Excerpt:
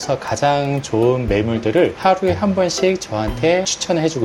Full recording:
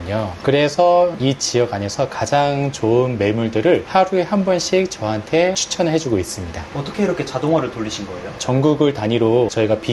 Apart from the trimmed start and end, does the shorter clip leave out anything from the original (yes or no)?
no